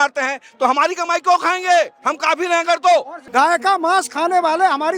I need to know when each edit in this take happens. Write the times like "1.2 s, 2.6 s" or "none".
3.2 s